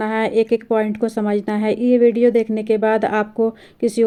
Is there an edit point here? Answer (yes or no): no